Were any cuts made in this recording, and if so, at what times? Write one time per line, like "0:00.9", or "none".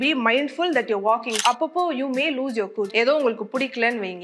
0:01.4
0:02.9